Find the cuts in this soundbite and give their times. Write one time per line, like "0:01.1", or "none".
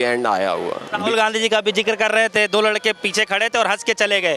0:01.0

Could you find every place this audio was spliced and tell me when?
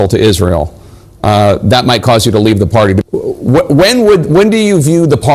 0:03.0

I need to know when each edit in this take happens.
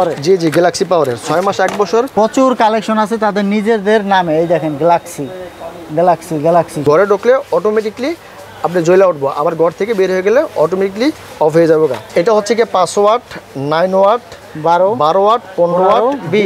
0:02.1
0:06.8
0:12.0

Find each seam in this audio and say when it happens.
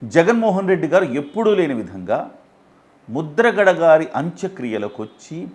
none

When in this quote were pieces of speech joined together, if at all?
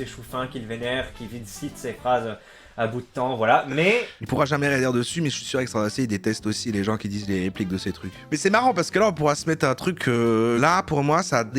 0:04.2
0:08.2
0:10.6

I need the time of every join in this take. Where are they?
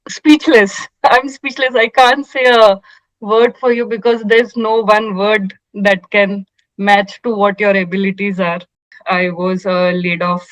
0:08.8

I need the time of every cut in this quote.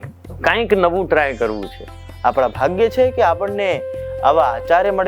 0:02.0

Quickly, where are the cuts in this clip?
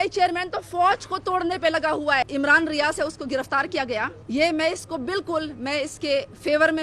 0:02.3
0:04.2

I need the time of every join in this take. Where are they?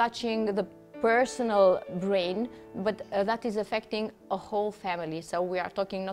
none

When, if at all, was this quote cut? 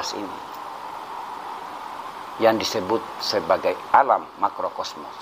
0:02.0

